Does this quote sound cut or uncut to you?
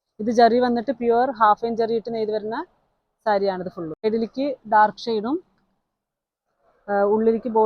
cut